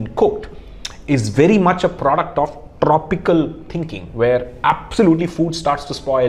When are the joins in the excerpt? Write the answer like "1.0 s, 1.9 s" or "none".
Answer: none